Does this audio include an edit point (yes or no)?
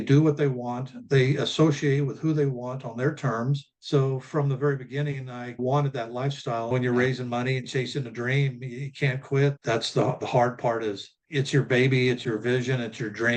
yes